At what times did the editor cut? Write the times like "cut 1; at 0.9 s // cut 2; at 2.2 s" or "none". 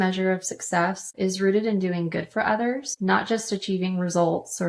cut 1; at 1.1 s // cut 2; at 2.9 s